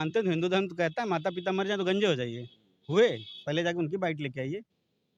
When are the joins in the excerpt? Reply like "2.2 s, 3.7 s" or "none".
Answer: none